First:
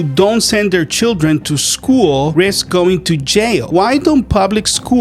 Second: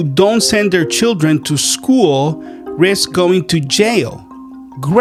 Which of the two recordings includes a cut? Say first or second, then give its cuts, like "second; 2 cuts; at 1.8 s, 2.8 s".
first; 2 cuts; at 2.3 s, 3.7 s